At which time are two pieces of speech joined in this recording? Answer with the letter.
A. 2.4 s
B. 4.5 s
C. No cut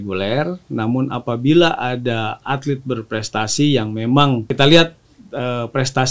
B